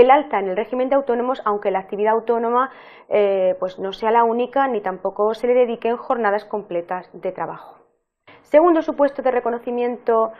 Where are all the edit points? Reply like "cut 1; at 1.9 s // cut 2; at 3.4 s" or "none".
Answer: cut 1; at 9.3 s

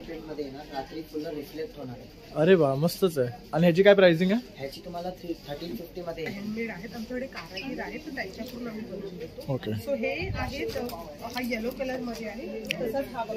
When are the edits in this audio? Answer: cut 1; at 6.3 s

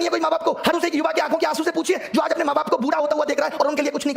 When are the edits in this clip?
none

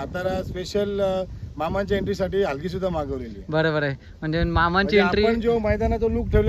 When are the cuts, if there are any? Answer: none

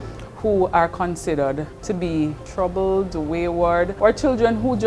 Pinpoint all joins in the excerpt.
cut 1; at 1.7 s // cut 2; at 2.4 s // cut 3; at 3.9 s

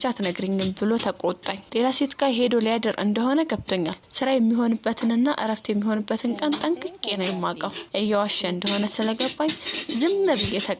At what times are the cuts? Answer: none

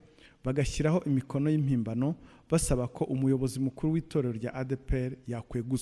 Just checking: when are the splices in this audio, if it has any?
none

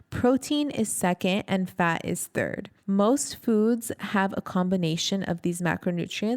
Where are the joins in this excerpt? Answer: cut 1; at 2.7 s

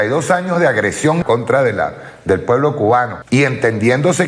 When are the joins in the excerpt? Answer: cut 1; at 1.2 s // cut 2; at 3.2 s

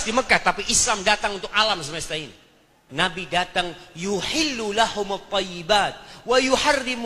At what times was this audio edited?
cut 1; at 2.8 s

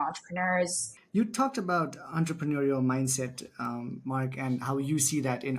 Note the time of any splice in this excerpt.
cut 1; at 0.9 s

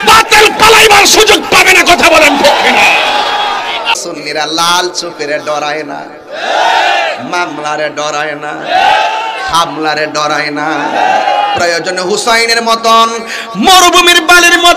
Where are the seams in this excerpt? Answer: cut 1; at 3.9 s

